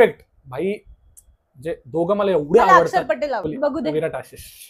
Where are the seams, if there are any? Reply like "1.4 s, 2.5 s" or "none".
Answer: 3.4 s